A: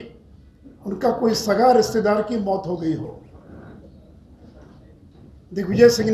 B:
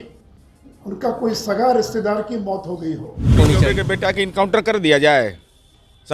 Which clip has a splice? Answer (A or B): B